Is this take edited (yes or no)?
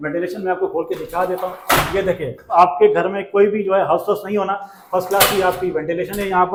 no